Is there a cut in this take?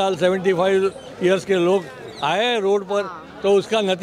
no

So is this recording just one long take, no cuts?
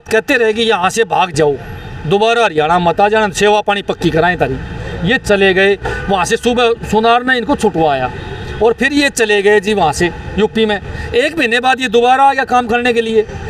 yes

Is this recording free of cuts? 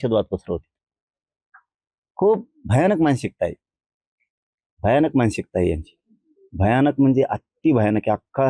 yes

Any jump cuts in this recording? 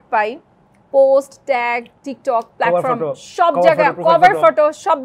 no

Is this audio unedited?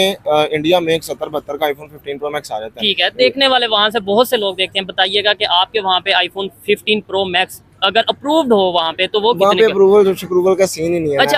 yes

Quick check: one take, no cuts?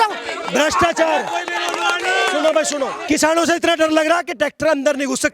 no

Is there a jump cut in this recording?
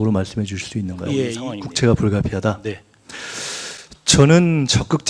yes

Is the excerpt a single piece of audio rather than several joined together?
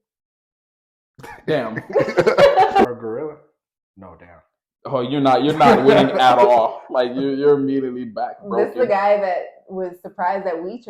no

